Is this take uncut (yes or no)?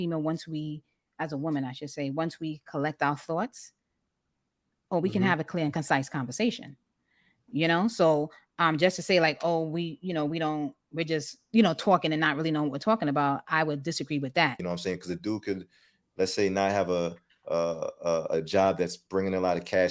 no